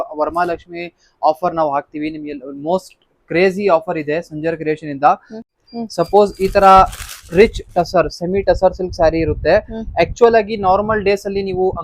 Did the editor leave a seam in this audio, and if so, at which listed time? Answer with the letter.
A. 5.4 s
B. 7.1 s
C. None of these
A